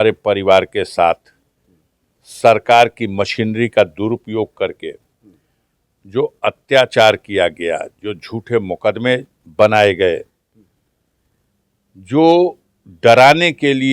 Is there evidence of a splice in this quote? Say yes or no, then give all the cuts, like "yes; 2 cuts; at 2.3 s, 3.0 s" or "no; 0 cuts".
no; 0 cuts